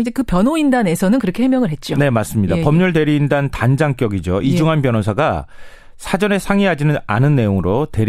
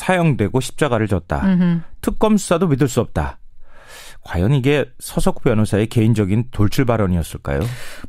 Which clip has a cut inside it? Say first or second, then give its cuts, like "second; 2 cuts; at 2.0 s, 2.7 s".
first; 1 cut; at 6.5 s